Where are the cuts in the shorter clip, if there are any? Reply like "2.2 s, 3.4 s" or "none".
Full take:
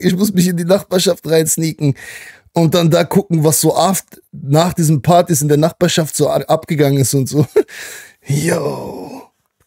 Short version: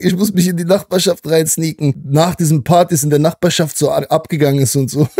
2.0 s